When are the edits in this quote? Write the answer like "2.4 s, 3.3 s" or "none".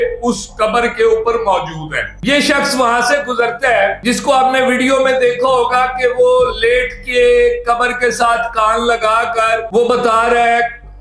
2.1 s